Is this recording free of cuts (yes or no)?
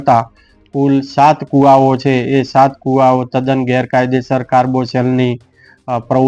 yes